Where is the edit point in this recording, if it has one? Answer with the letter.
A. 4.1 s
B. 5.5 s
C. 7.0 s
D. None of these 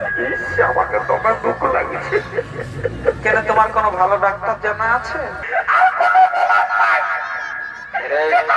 B